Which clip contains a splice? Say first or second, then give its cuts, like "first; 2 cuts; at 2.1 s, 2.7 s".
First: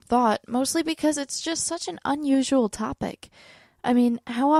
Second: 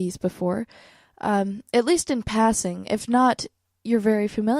second; 1 cut; at 1.2 s